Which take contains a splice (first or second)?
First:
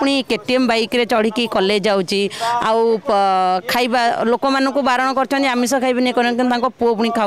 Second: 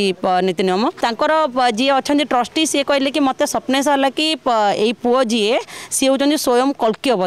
second